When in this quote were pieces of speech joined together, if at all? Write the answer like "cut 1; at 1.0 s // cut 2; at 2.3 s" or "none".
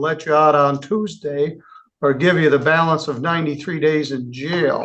none